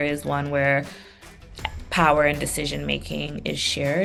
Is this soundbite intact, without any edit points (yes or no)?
yes